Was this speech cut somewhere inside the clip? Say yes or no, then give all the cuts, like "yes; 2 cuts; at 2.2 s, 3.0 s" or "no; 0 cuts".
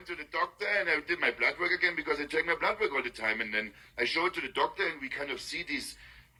no; 0 cuts